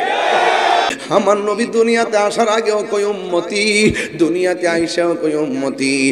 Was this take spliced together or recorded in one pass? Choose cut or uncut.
cut